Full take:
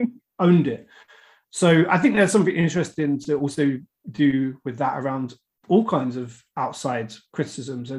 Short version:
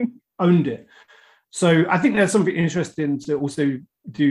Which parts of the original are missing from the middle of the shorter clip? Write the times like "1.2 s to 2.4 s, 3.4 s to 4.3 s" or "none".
none